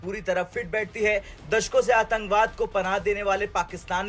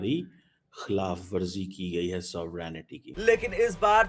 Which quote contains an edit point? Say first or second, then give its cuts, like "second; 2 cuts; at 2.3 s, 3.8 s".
second; 1 cut; at 3.1 s